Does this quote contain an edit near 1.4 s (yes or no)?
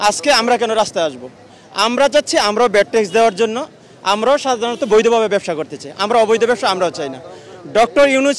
no